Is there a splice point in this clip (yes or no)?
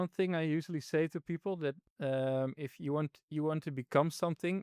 no